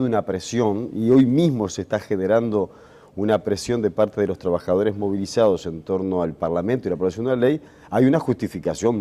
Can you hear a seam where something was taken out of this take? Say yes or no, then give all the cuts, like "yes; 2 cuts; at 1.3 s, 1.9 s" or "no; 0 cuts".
yes; 1 cut; at 5.2 s